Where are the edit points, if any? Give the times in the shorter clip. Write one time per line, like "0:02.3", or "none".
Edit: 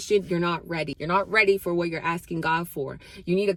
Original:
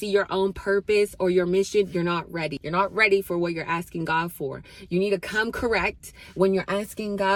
none

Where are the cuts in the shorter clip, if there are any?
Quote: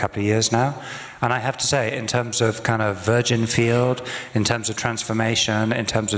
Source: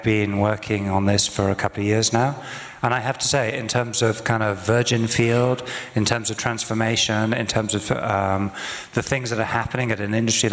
none

